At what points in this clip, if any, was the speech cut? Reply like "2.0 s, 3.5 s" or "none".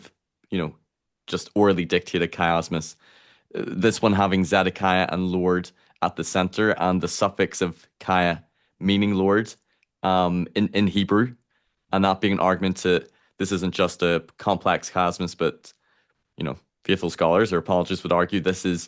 none